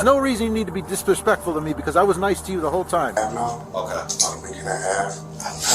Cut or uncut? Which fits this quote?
cut